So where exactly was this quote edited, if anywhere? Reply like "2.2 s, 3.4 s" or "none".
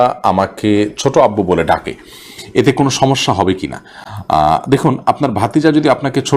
none